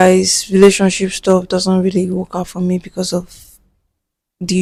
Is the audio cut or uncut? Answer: uncut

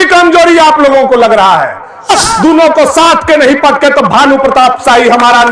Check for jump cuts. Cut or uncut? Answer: cut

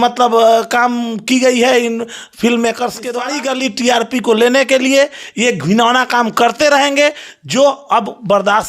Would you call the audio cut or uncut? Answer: cut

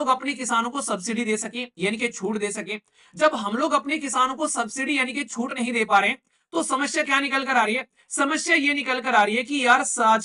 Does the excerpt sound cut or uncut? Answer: uncut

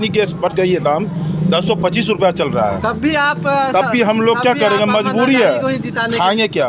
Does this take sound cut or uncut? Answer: uncut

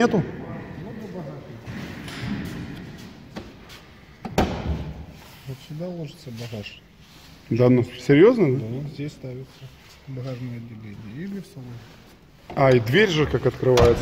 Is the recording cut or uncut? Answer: uncut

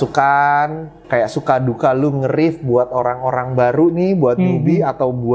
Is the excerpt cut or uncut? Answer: uncut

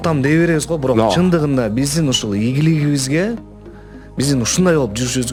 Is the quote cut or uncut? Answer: uncut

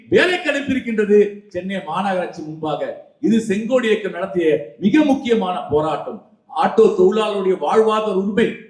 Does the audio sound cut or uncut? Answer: uncut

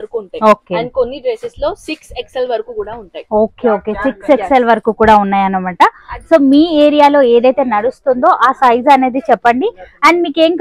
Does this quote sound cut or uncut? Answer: uncut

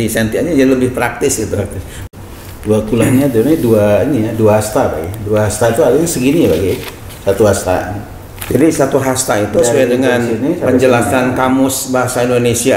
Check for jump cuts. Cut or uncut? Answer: cut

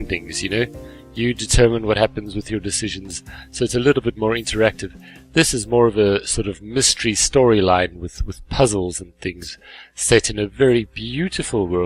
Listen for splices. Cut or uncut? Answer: uncut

